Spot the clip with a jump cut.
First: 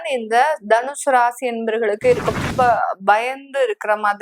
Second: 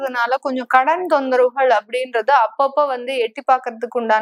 first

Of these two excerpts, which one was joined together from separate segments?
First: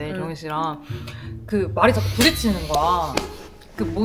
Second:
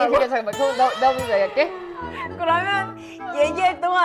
second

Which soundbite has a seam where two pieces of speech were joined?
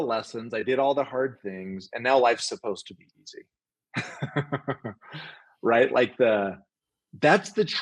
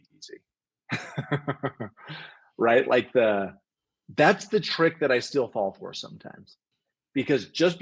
second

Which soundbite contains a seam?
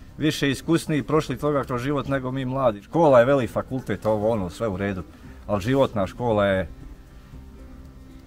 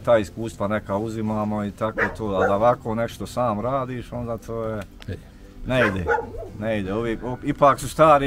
first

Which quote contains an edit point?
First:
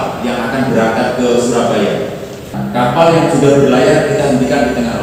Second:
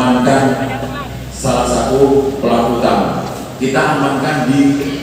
first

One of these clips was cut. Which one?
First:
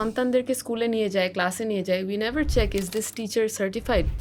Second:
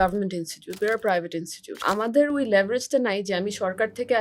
second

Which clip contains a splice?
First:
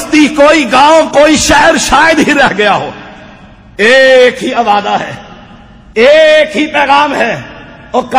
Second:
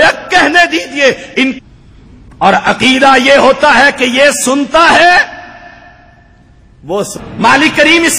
second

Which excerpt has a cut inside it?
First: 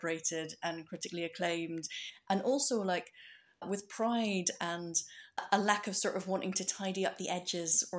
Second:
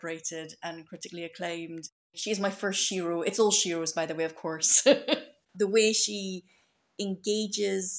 second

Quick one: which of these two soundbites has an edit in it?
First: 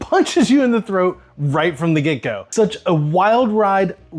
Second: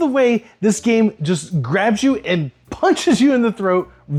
first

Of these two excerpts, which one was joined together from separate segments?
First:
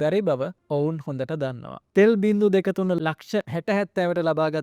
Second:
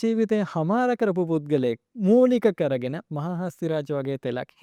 first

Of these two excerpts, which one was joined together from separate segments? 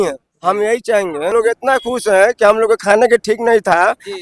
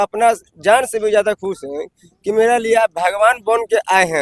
first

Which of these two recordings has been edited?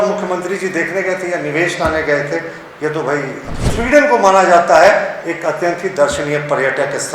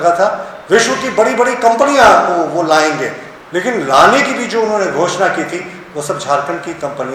first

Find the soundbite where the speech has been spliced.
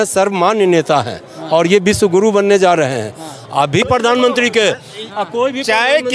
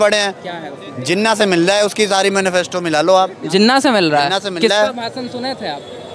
first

